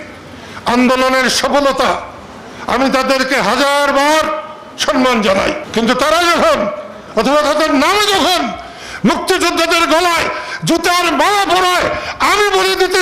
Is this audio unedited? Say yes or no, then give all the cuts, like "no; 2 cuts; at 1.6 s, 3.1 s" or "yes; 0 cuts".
yes; 0 cuts